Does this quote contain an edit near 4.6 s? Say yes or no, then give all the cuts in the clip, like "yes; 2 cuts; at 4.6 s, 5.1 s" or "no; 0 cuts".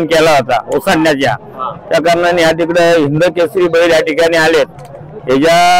no; 0 cuts